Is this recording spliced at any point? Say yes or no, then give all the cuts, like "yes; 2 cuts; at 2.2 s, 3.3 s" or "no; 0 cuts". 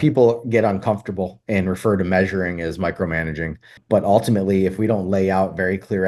yes; 1 cut; at 3.8 s